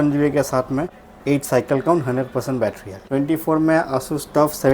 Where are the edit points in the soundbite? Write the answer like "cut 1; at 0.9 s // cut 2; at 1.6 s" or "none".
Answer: cut 1; at 1.0 s // cut 2; at 3.0 s

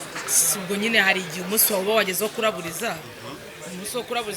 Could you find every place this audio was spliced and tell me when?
none

